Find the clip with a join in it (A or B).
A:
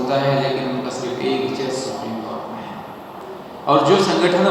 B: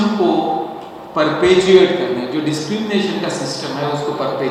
A